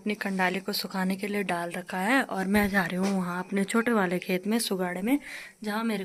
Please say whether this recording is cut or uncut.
uncut